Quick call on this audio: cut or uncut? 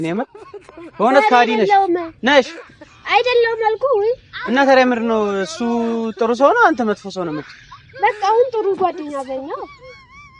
uncut